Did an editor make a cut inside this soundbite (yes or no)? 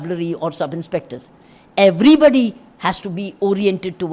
no